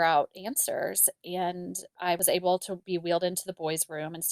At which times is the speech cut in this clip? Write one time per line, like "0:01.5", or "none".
0:02.0